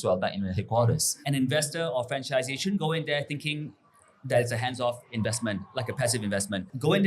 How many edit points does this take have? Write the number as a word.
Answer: one